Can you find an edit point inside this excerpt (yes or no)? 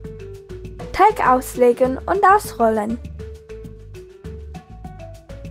yes